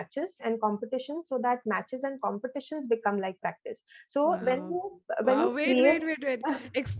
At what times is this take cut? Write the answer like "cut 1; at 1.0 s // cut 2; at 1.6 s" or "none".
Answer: none